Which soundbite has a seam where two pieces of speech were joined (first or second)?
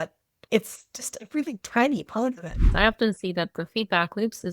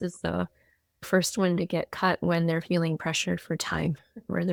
first